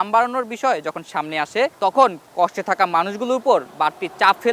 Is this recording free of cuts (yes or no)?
no